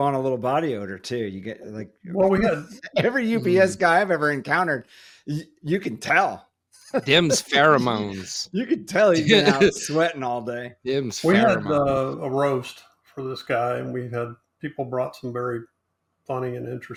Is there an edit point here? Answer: no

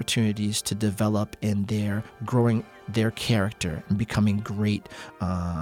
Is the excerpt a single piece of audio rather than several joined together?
yes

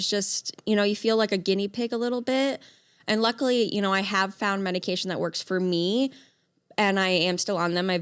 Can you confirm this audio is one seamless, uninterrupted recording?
yes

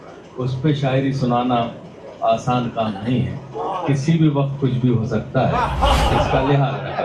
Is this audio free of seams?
yes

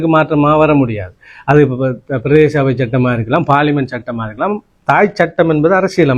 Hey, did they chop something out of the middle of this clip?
no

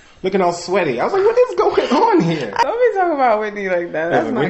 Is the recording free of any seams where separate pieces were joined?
no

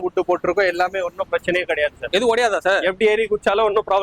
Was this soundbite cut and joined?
yes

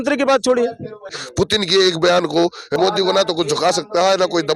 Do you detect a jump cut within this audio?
yes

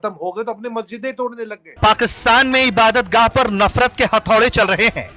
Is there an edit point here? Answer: yes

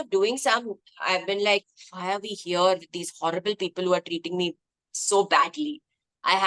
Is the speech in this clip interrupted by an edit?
no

